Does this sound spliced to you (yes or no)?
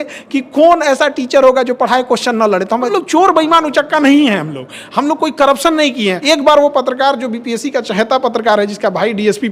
yes